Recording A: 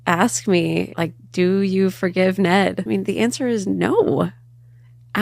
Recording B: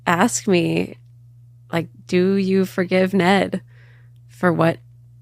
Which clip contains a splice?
A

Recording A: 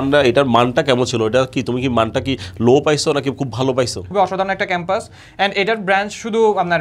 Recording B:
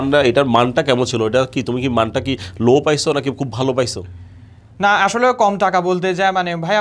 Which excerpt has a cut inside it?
A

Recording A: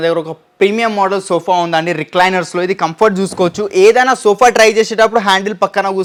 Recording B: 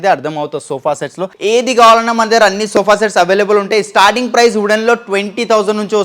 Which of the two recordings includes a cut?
B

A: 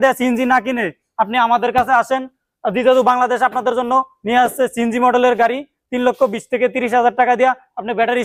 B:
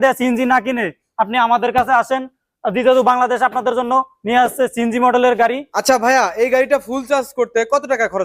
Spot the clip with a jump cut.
B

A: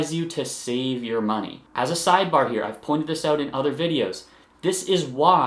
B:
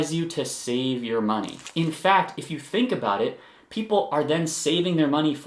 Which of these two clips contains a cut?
B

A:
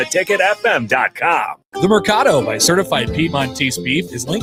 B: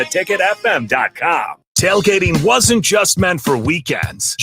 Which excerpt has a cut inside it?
B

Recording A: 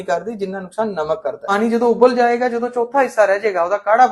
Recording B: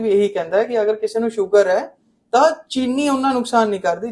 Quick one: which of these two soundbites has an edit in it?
A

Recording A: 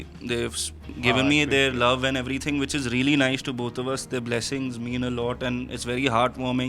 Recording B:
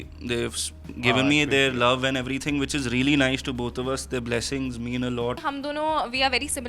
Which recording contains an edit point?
B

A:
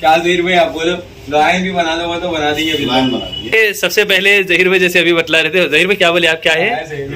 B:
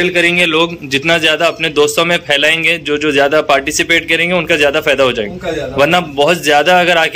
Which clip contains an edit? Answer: A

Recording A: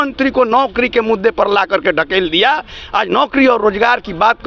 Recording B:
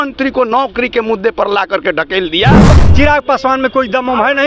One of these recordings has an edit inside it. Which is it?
B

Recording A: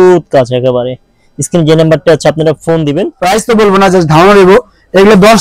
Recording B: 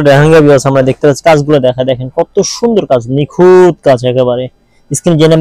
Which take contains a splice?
A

